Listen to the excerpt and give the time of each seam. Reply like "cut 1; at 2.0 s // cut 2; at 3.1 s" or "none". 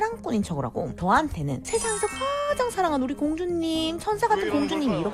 cut 1; at 0.9 s